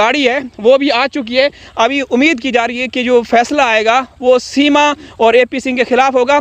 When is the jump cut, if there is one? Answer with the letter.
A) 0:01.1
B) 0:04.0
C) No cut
C